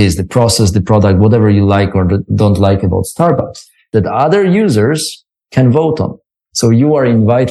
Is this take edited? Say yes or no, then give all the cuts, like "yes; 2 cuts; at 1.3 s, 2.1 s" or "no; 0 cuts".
yes; 2 cuts; at 3.8 s, 6.4 s